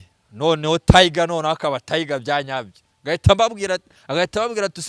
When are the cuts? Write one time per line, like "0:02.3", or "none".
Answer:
none